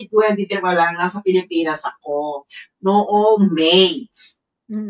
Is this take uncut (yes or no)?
yes